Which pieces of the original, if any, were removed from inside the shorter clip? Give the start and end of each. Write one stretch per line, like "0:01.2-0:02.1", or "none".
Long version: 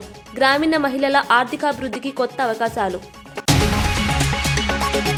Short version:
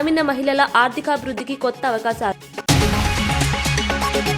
0:03.0-0:03.3